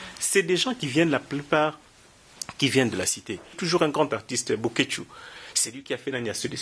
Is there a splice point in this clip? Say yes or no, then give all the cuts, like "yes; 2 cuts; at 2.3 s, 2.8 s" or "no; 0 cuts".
yes; 1 cut; at 3.6 s